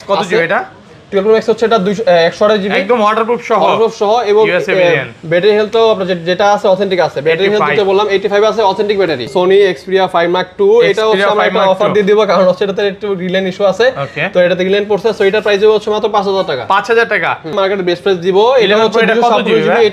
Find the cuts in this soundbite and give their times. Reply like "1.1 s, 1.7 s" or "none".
9.3 s, 17.5 s